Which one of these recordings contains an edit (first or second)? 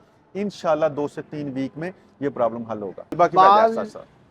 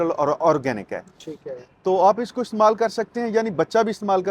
first